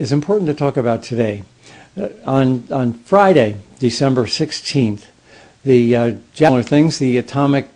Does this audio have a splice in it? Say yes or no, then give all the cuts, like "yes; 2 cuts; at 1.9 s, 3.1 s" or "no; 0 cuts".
no; 0 cuts